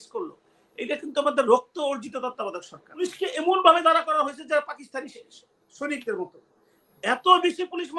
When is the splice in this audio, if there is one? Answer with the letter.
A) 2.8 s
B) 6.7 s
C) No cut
A